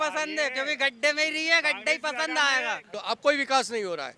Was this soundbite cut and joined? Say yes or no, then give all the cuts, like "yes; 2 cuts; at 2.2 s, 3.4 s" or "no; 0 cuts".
yes; 1 cut; at 2.9 s